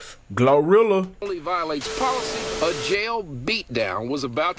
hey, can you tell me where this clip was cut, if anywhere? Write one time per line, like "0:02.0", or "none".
0:02.3